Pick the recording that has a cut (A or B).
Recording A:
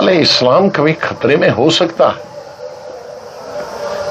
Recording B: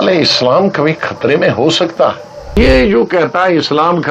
B